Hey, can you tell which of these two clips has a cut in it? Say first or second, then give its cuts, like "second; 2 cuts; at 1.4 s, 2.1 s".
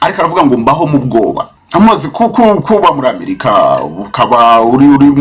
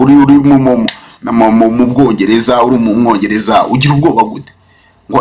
first; 1 cut; at 1.5 s